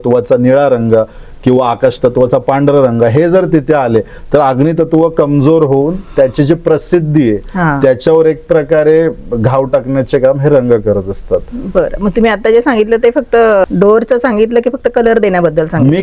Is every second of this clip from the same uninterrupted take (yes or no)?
yes